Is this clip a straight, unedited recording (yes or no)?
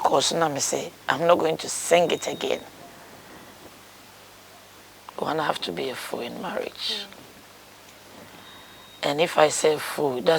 no